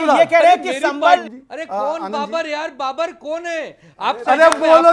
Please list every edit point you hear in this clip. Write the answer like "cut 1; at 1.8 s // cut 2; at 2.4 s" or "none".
cut 1; at 1.2 s